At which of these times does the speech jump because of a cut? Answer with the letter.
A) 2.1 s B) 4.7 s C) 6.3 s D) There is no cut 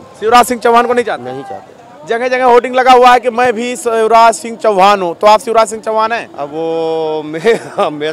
D